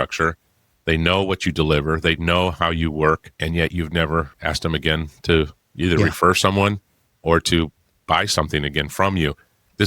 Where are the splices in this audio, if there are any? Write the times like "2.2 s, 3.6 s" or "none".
3.3 s, 4.3 s